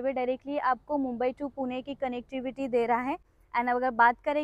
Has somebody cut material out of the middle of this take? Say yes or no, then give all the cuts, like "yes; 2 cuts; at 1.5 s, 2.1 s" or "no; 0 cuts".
yes; 1 cut; at 3.3 s